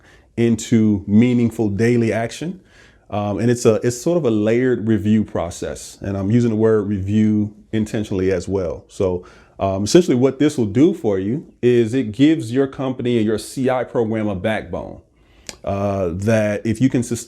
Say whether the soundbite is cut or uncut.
uncut